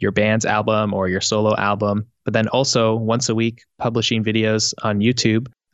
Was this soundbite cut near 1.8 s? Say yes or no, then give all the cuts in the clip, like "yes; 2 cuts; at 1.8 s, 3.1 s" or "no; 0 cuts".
no; 0 cuts